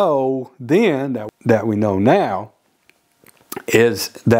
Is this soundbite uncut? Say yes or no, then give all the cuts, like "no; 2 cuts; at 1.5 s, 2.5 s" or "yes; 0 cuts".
no; 1 cut; at 1.2 s